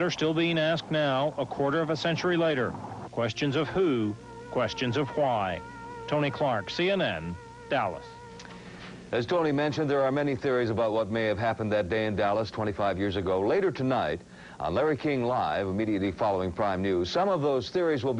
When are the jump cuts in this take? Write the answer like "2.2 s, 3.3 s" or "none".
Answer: 13.5 s